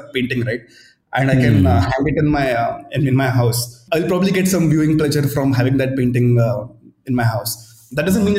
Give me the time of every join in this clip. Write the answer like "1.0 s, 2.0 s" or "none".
3.8 s